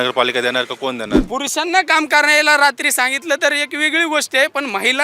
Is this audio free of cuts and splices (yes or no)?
no